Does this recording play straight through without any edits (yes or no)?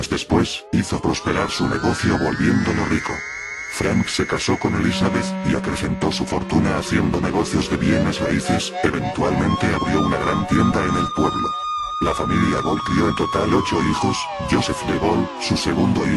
no